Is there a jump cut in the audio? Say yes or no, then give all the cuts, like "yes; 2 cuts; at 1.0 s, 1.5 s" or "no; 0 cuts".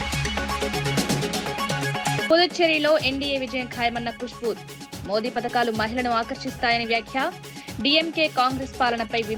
yes; 1 cut; at 2.2 s